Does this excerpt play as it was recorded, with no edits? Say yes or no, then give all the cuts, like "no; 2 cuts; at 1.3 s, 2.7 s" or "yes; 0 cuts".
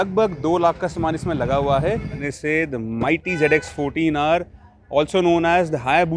no; 1 cut; at 2.3 s